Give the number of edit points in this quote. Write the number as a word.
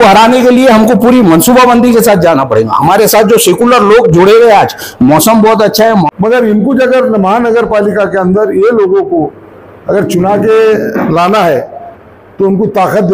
one